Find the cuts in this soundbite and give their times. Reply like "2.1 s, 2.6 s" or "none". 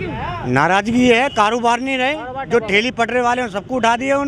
none